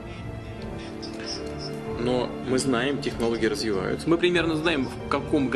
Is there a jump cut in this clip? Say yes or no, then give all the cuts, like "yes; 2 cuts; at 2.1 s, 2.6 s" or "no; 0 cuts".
yes; 1 cut; at 2.4 s